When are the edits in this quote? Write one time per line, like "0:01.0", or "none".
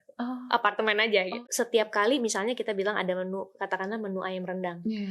0:01.3